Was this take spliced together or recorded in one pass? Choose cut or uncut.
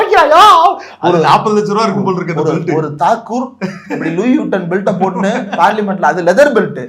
uncut